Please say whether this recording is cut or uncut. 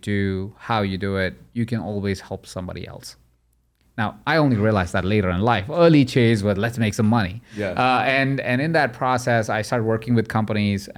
uncut